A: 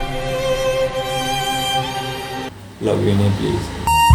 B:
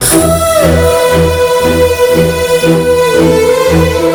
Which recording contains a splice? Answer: A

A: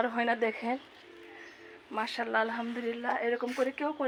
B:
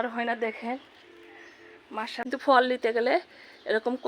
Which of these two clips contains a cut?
B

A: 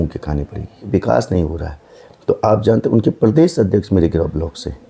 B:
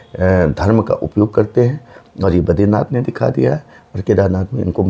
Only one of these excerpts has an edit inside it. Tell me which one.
A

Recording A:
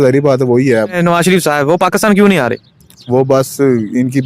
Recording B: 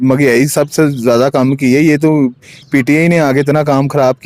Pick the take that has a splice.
A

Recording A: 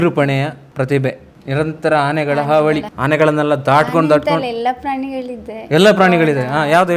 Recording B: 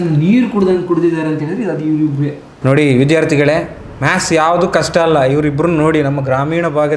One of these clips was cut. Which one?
B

